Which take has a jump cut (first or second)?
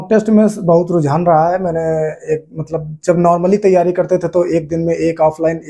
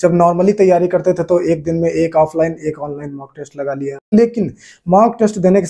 second